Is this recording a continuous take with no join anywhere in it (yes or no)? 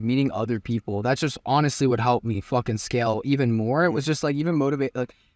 yes